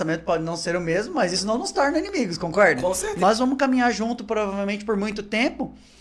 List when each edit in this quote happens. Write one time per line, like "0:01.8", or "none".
0:03.1